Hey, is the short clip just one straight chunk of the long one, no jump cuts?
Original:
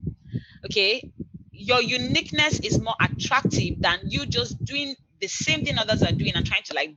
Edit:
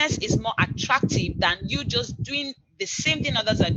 yes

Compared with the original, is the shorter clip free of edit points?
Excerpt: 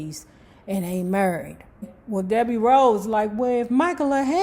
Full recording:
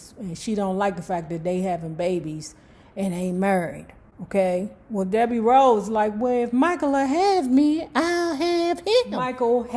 no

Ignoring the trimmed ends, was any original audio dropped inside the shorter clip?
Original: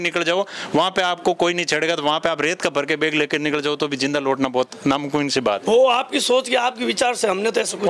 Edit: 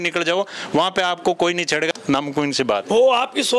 yes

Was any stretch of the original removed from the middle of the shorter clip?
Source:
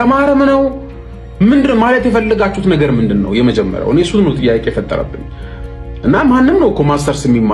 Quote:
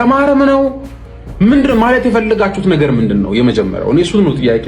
no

